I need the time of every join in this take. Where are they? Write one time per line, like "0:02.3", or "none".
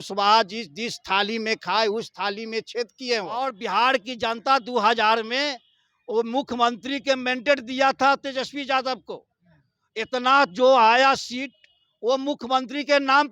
0:03.3